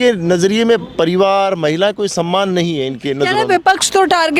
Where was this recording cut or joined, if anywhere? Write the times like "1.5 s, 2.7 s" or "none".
none